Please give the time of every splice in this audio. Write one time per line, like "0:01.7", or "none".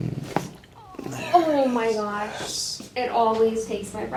none

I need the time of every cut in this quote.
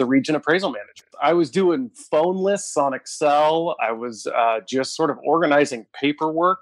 0:01.0

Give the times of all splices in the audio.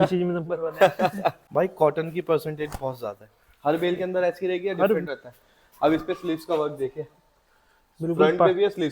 0:01.4

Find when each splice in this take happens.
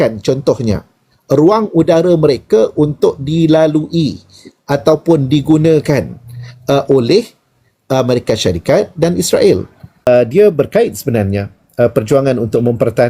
0:10.1

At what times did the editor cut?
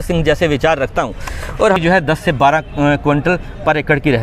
0:01.8

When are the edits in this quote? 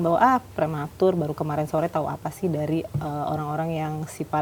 none

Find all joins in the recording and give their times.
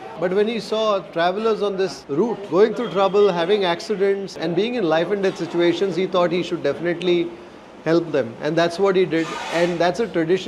none

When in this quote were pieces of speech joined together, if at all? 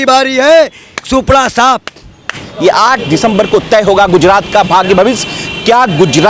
0:02.5

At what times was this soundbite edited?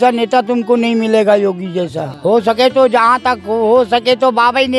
0:02.1

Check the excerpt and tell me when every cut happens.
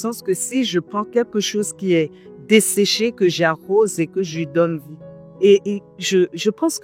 none

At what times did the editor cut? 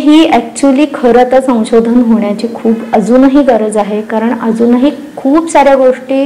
none

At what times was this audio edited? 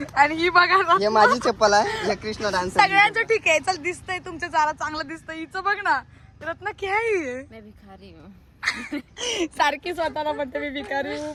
none

